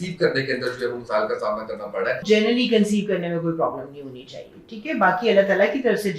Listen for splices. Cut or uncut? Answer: cut